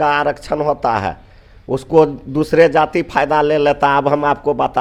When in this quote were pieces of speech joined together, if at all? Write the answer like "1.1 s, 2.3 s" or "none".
none